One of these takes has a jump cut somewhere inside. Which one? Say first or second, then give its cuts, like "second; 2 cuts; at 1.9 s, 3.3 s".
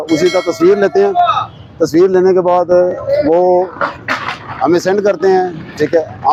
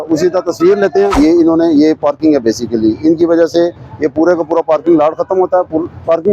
second; 1 cut; at 1.1 s